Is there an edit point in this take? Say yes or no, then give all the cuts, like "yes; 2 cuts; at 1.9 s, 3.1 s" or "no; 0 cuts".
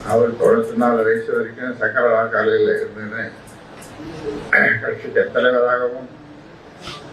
no; 0 cuts